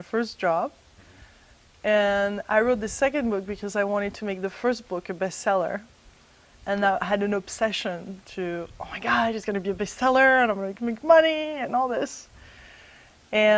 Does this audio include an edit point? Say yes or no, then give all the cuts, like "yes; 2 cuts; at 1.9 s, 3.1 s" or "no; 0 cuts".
no; 0 cuts